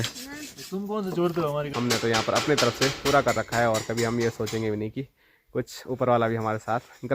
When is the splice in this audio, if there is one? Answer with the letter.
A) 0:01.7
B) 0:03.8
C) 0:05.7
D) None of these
A